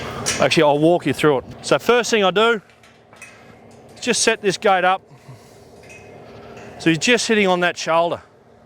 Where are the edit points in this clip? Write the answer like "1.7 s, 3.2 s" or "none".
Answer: 1.5 s